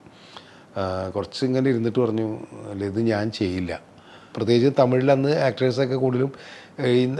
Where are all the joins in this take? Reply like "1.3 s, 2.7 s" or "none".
4.3 s